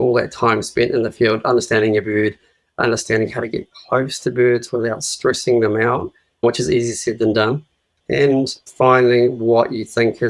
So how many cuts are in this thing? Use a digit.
1